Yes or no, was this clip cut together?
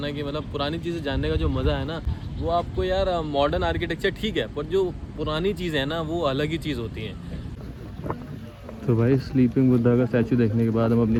no